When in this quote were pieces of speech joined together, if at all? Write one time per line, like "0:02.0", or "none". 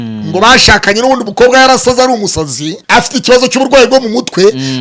0:02.8